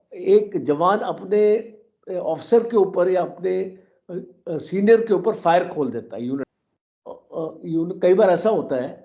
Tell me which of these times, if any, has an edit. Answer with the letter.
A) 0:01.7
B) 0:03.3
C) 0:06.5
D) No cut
C